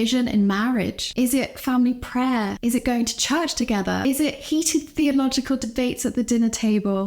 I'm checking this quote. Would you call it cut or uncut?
cut